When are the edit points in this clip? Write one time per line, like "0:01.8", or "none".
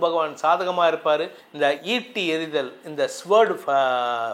0:01.4